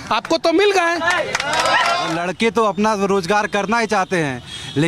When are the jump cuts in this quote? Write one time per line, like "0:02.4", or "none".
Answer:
0:02.1